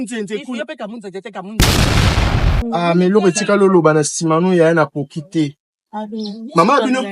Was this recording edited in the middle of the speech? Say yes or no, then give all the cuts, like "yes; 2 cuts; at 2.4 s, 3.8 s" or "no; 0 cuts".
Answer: yes; 2 cuts; at 1.5 s, 2.5 s